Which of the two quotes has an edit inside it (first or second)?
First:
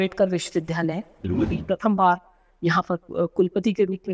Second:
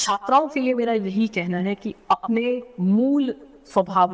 first